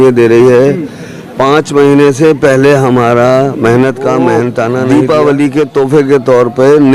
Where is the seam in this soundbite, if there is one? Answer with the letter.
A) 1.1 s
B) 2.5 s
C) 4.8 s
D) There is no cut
C